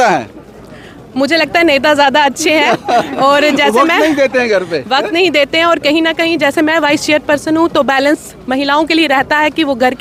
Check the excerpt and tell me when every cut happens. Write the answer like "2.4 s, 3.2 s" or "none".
none